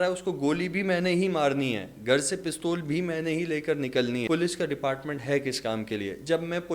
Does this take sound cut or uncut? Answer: cut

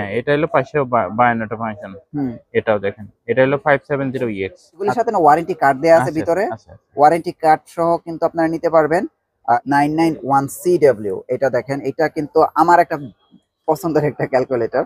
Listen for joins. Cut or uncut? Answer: cut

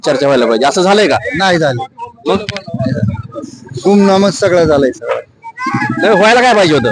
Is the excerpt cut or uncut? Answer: uncut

